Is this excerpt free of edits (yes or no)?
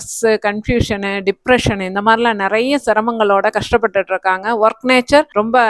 yes